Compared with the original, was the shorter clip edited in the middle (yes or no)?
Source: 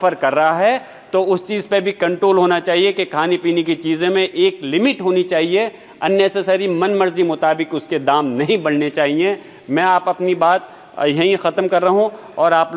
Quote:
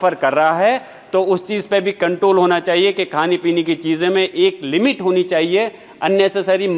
no